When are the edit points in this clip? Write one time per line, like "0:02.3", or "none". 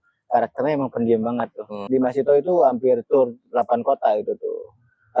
0:01.8